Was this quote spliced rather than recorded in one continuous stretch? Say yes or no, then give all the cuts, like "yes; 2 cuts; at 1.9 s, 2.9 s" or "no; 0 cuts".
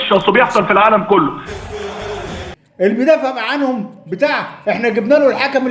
yes; 2 cuts; at 1.4 s, 2.6 s